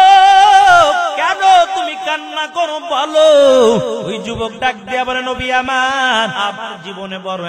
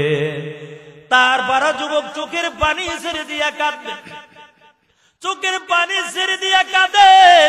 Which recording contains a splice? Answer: first; 3 cuts; at 1.2 s, 4.2 s, 6.3 s

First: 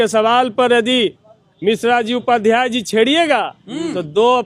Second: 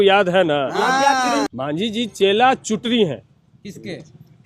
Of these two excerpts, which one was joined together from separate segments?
second; 1 cut; at 1.5 s

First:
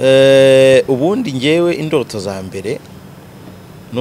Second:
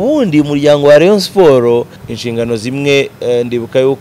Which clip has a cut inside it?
second; 1 cut; at 2.0 s

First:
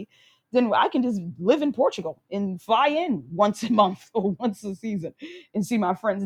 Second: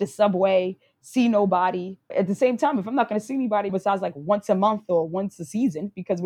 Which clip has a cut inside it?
second; 2 cuts; at 2.0 s, 3.7 s

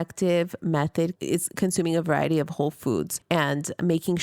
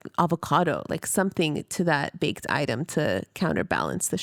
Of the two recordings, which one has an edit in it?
first; 2 cuts; at 1.2 s, 3.2 s

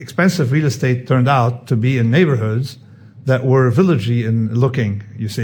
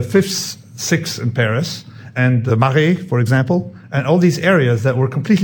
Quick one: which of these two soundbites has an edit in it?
second; 1 cut; at 2.2 s

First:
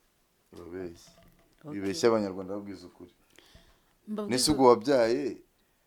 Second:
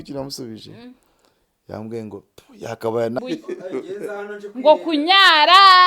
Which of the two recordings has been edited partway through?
second; 1 cut; at 3.2 s

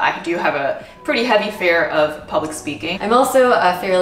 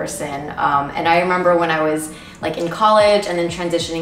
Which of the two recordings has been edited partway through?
first; 1 cut; at 2.9 s

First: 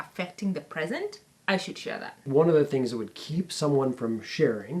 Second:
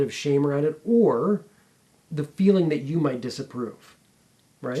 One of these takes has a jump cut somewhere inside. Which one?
first; 2 cuts; at 1.3 s, 2.3 s

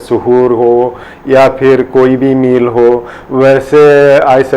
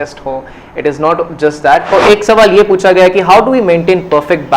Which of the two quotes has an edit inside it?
second; 1 cut; at 1.9 s

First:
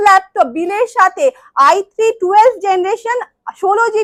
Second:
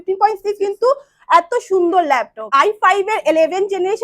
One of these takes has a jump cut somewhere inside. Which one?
second; 1 cut; at 2.5 s

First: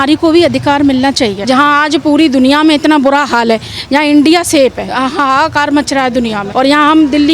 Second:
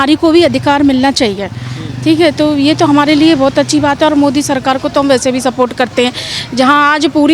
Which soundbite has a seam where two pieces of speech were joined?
first; 2 cuts; at 1.4 s, 4.9 s

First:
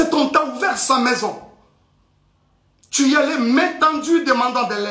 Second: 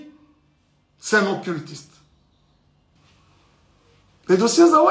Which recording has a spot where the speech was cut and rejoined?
second; 1 cut; at 3.0 s

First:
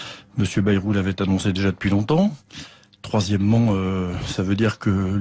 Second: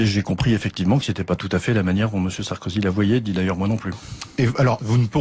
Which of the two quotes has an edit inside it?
first; 1 cut; at 2.5 s

